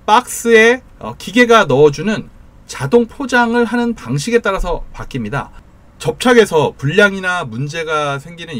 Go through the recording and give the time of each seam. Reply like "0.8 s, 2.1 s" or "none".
5.6 s